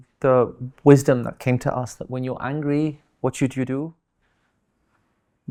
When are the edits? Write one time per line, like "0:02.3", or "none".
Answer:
none